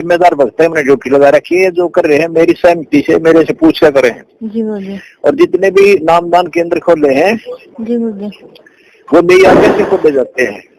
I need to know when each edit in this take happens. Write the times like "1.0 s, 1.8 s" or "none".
none